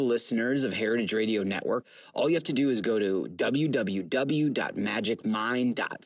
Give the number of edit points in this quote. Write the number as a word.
one